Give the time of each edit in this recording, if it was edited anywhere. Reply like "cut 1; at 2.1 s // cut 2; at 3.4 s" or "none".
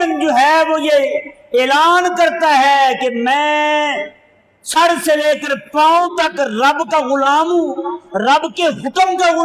none